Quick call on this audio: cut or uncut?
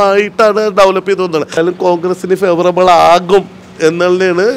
cut